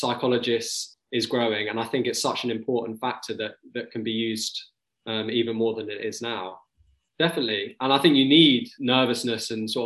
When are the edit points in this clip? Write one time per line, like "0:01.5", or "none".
0:06.8
0:08.7